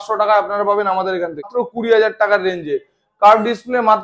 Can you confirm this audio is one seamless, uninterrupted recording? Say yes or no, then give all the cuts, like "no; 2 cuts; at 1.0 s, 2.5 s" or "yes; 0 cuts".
no; 1 cut; at 1.5 s